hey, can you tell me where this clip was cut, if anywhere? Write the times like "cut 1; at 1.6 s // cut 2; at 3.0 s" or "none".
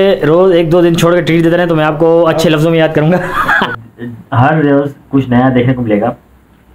cut 1; at 3.8 s

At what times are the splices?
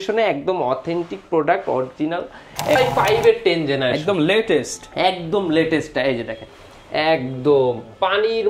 cut 1; at 2.8 s

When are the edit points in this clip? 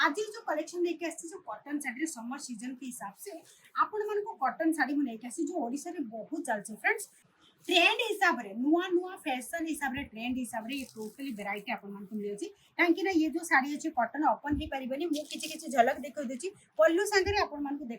cut 1; at 7.1 s

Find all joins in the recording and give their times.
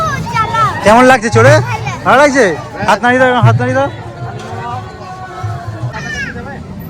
cut 1; at 5.9 s

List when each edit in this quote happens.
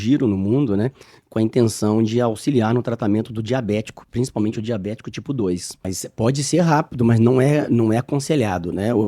cut 1; at 5.9 s

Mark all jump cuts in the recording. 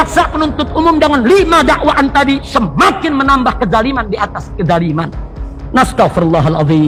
none

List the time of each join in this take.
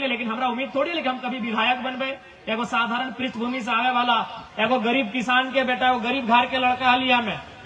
none

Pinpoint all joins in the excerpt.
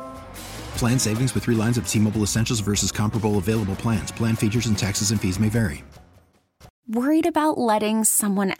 cut 1; at 6.7 s

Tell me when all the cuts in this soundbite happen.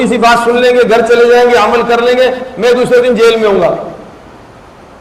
none

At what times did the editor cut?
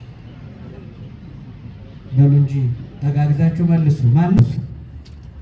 cut 1; at 4.4 s

